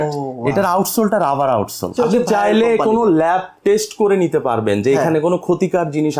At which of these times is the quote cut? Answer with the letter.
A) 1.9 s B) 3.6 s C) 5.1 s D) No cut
A